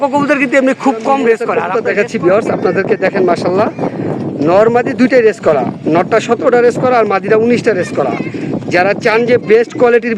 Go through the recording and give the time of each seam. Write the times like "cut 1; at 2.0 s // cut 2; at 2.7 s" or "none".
cut 1; at 1.5 s